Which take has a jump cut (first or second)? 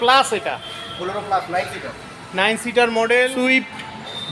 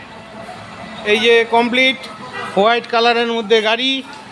first